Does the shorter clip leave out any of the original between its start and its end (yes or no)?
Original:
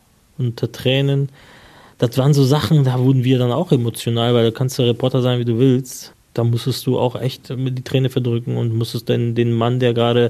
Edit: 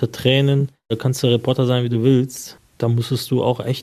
yes